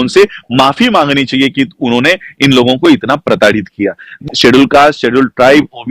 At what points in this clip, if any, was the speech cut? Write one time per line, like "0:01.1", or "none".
0:04.2